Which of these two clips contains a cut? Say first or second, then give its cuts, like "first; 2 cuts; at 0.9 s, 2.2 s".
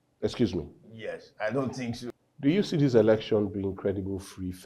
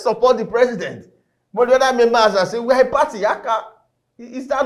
first; 1 cut; at 2.1 s